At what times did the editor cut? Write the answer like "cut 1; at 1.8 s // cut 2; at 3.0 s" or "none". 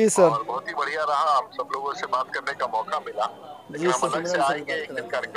none